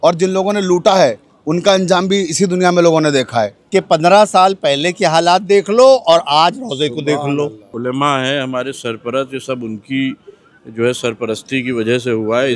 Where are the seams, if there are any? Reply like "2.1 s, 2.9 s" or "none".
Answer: 3.6 s, 7.7 s